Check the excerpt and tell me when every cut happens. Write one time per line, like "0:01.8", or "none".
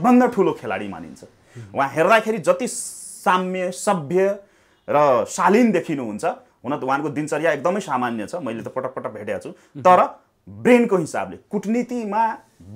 none